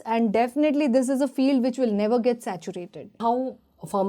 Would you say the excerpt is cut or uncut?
cut